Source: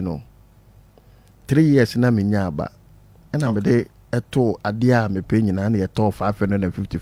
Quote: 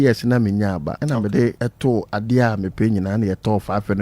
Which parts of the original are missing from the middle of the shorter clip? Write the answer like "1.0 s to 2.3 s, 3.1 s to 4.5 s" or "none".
2.7 s to 3.3 s, 3.9 s to 4.1 s